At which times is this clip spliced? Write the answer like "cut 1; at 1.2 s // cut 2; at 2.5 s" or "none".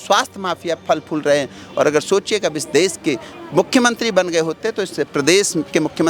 none

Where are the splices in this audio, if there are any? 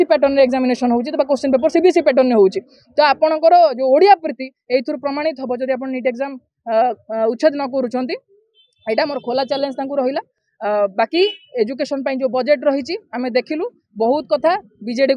none

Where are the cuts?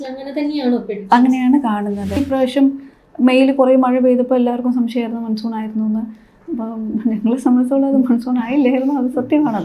cut 1; at 2.2 s

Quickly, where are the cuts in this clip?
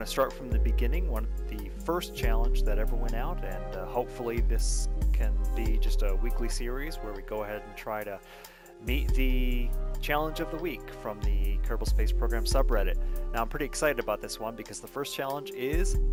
none

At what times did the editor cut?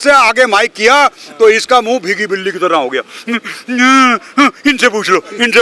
none

